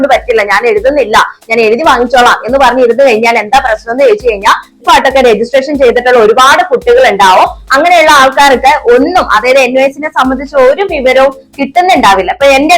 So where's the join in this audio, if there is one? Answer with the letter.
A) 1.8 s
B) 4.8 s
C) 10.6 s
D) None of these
B